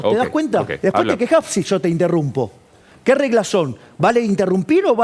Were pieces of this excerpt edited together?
no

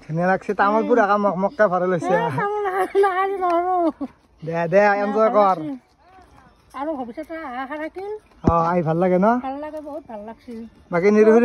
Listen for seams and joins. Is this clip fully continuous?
yes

